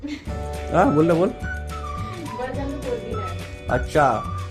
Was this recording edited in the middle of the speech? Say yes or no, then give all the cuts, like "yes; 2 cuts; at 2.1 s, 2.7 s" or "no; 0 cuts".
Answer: no; 0 cuts